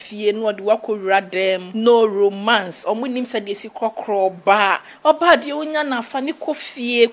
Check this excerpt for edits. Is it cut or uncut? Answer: cut